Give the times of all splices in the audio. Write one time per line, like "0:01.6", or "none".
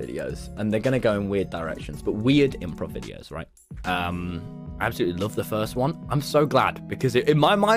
none